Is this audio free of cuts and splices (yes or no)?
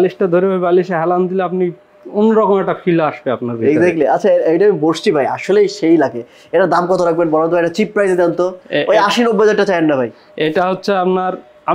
yes